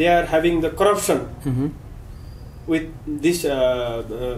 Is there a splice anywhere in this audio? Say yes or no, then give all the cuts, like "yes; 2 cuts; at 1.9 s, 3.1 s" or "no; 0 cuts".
no; 0 cuts